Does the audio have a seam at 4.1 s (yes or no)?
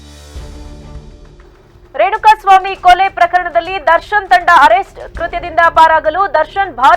no